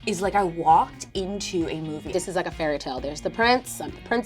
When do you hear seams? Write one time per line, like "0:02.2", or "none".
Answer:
0:02.1